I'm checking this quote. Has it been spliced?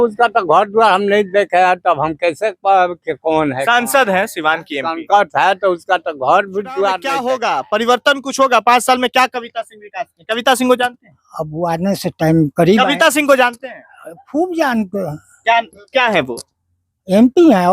yes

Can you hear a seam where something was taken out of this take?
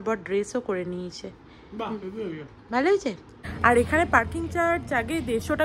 yes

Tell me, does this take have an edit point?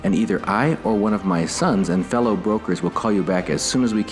no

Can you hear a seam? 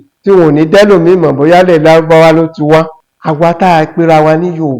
yes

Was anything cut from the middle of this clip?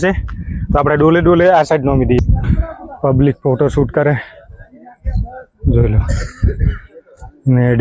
yes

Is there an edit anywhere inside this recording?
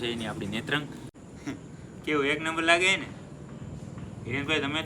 yes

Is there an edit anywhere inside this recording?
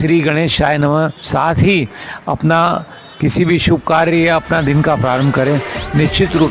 yes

